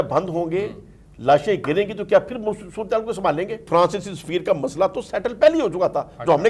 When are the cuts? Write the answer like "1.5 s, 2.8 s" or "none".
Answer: 3.6 s